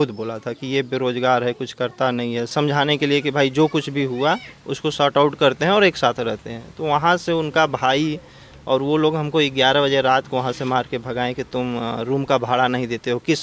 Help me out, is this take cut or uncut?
cut